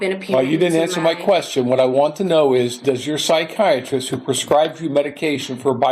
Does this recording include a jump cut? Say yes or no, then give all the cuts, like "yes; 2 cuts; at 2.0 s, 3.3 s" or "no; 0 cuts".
no; 0 cuts